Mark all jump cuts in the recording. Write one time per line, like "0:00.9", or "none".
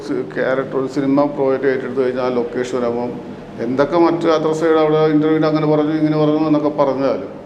none

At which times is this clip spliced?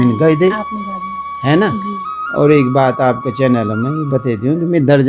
0:01.9

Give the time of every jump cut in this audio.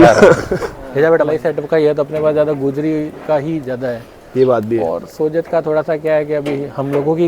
0:01.2

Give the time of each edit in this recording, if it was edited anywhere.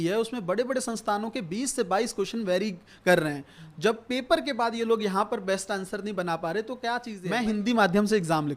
0:07.1

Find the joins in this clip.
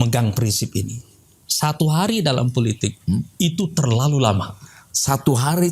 none

